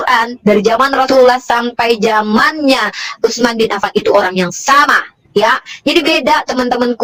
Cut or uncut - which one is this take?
uncut